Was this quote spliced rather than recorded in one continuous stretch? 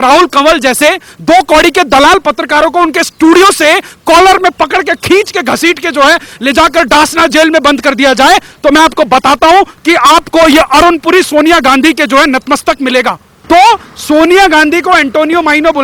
yes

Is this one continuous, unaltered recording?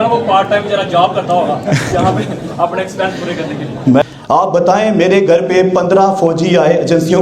no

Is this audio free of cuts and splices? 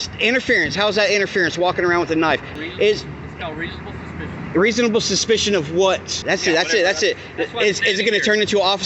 no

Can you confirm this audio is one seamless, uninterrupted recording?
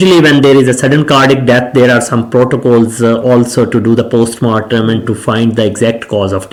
yes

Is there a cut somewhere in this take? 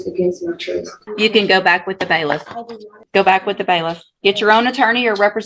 yes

